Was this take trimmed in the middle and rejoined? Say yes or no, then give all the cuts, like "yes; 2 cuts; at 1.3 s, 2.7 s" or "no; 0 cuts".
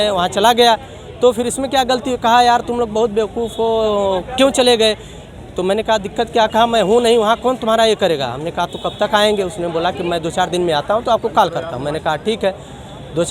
no; 0 cuts